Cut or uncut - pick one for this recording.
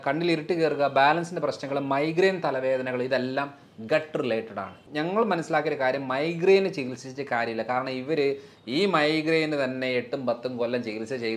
cut